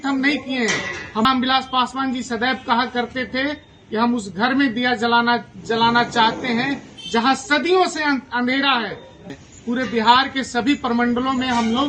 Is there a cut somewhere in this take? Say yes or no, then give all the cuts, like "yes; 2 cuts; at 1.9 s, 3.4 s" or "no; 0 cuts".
yes; 2 cuts; at 1.2 s, 9.2 s